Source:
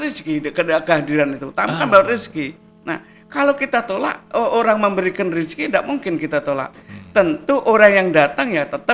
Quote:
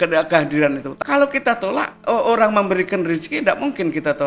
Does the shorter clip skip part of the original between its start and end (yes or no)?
yes